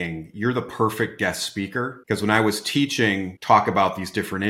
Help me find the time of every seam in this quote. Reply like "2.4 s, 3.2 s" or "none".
2.0 s, 3.3 s